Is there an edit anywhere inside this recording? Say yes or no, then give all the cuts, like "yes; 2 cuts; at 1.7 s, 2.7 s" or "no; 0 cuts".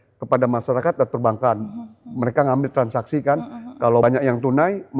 yes; 1 cut; at 4.0 s